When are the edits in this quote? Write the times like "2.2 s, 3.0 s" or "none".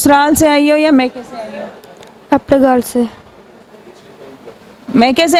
none